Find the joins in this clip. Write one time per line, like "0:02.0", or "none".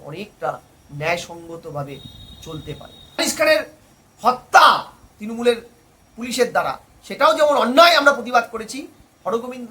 0:03.2